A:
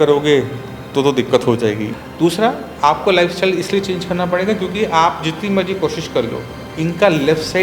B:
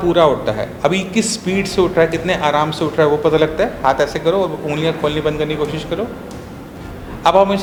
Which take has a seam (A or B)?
A